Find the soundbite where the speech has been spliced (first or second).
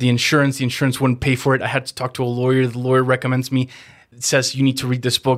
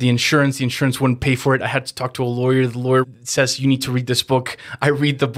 second